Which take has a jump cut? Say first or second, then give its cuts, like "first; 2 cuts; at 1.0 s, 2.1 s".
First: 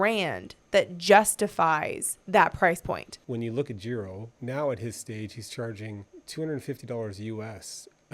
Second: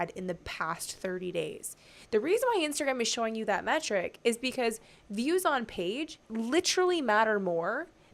first; 3 cuts; at 3.1 s, 4.3 s, 6.1 s